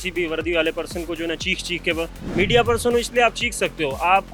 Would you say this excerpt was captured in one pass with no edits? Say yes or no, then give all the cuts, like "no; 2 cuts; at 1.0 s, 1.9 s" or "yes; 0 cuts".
yes; 0 cuts